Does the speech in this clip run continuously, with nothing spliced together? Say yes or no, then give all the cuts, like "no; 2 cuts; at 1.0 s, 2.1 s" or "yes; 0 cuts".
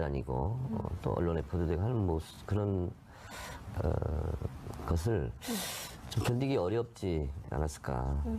no; 1 cut; at 3.9 s